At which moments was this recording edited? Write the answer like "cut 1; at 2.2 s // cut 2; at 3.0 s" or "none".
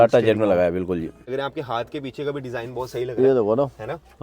cut 1; at 1.3 s